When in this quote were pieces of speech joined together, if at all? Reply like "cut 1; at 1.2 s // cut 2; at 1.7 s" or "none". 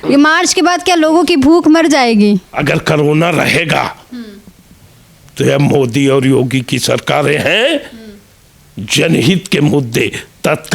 none

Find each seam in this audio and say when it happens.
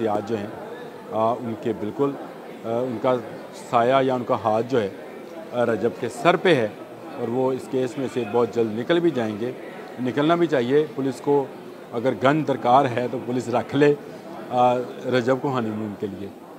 none

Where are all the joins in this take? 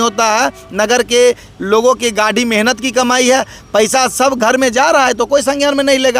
none

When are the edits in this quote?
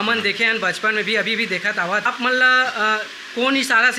cut 1; at 2.1 s

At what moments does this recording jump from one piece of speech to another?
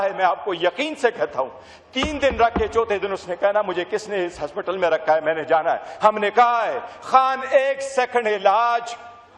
none

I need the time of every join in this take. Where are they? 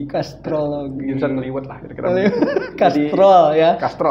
none

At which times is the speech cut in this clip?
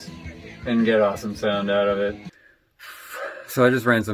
cut 1; at 2.3 s

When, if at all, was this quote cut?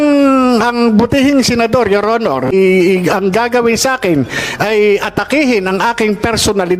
cut 1; at 2.5 s

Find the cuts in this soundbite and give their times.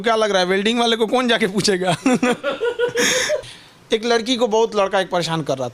cut 1; at 3.5 s

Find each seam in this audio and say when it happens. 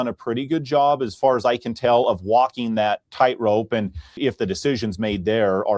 cut 1; at 3.0 s // cut 2; at 4.1 s

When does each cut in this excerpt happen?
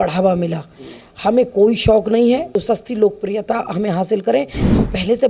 cut 1; at 2.5 s

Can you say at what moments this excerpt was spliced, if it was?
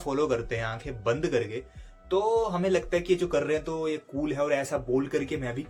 none

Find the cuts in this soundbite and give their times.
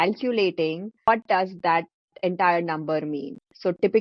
cut 1; at 1.1 s

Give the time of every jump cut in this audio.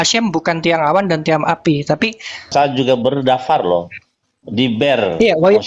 cut 1; at 2.5 s

